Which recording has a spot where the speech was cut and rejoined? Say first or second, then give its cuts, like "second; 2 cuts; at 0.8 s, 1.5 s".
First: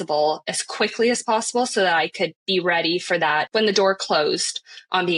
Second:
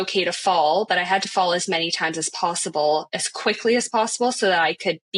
first; 1 cut; at 3.5 s